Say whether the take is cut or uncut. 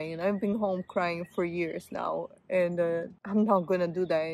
cut